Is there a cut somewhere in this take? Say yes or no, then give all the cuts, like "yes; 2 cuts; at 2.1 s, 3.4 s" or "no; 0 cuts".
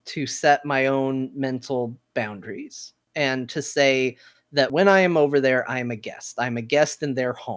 yes; 1 cut; at 4.7 s